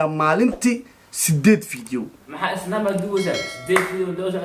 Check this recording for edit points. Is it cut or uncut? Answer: uncut